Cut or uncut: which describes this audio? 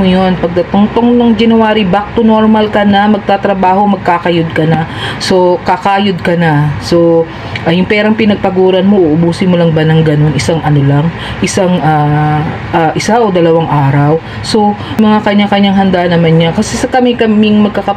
uncut